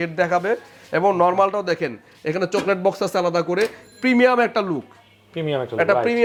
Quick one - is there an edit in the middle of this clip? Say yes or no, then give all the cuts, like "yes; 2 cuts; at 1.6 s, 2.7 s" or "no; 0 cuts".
no; 0 cuts